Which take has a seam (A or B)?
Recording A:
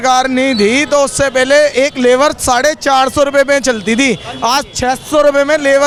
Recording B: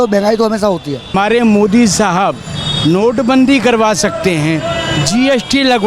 B